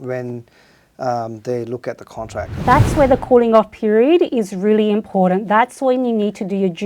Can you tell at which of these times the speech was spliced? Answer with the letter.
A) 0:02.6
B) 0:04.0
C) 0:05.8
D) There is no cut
A